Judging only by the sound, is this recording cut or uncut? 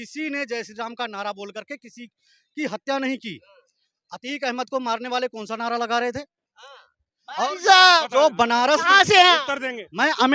uncut